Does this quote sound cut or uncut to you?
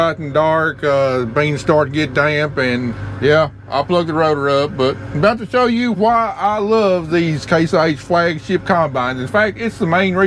cut